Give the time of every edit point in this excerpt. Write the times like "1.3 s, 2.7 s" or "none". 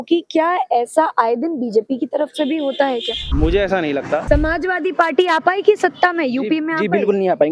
3.2 s, 4.2 s

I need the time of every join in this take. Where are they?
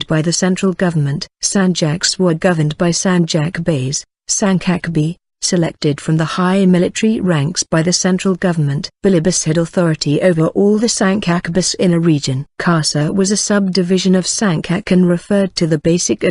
10.5 s

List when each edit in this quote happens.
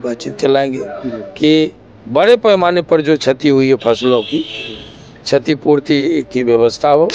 none

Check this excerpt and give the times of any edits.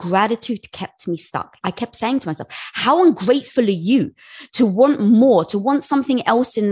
1.5 s

